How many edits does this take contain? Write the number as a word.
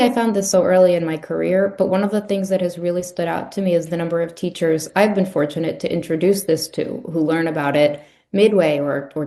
zero